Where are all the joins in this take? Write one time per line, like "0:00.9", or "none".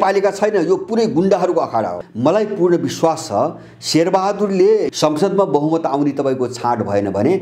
0:02.0
0:04.9